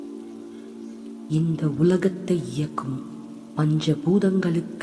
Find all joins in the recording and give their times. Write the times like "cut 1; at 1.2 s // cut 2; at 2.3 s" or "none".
none

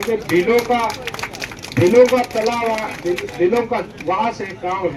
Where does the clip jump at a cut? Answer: none

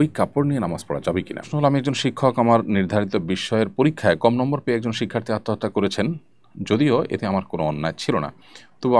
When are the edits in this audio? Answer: cut 1; at 1.5 s

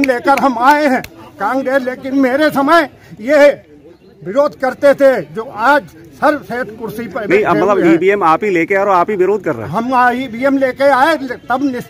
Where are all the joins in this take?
none

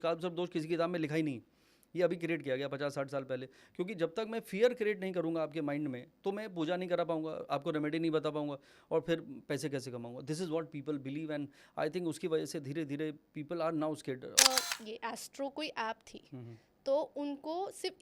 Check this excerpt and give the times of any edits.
cut 1; at 14.4 s

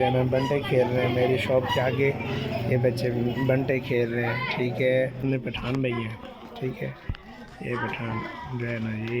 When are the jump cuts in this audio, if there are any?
cut 1; at 5.2 s

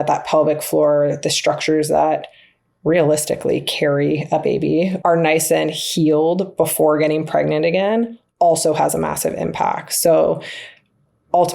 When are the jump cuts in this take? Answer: cut 1; at 4.9 s

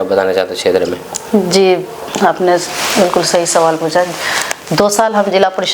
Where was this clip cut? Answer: none

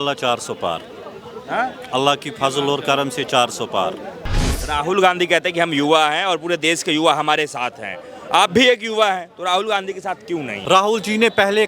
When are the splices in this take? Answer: cut 1; at 4.4 s // cut 2; at 10.6 s

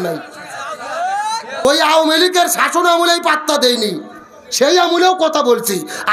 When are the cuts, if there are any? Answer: cut 1; at 1.6 s

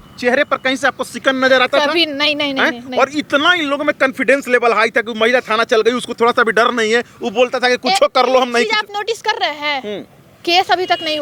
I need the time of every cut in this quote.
none

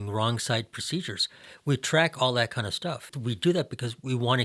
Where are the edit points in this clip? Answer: cut 1; at 3.1 s

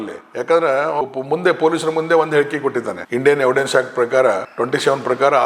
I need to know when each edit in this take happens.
cut 1; at 1.0 s // cut 2; at 4.5 s

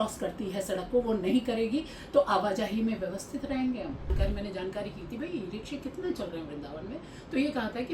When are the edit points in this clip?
cut 1; at 4.1 s

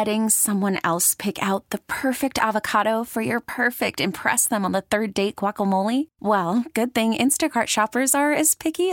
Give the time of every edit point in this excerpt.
none

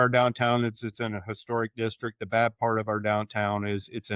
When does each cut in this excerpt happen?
none

